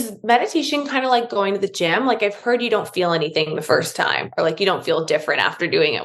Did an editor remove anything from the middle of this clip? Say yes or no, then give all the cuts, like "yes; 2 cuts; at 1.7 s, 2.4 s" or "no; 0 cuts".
no; 0 cuts